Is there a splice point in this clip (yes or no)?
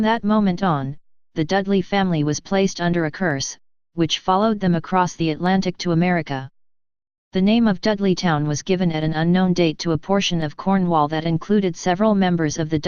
yes